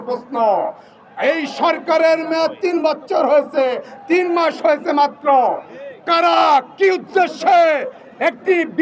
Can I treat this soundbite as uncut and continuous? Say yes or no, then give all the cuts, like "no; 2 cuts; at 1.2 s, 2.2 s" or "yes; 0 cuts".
yes; 0 cuts